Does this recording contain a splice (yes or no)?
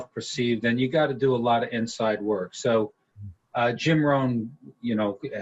no